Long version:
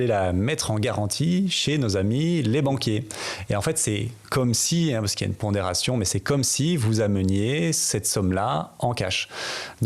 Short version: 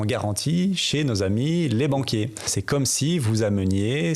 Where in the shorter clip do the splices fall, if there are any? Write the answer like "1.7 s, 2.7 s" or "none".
2.5 s